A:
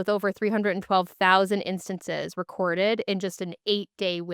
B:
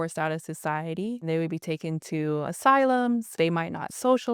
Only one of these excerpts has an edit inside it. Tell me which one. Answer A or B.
B